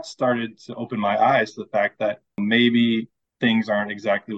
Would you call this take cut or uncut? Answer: cut